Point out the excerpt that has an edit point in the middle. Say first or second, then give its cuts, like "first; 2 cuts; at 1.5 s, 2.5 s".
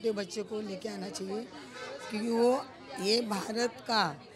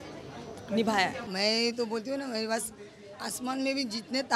second; 1 cut; at 1.2 s